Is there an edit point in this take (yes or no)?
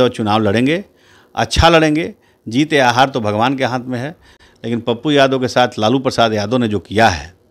no